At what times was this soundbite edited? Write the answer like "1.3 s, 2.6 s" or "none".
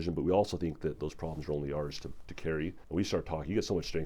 2.8 s